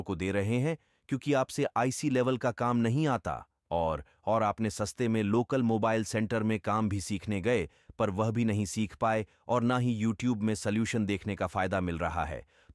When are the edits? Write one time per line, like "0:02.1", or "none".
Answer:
none